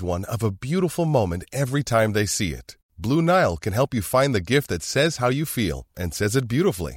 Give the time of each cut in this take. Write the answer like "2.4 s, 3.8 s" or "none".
none